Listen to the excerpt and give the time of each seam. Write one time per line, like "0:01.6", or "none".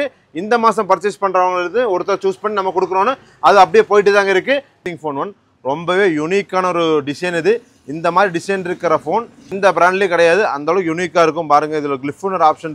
0:04.8
0:09.5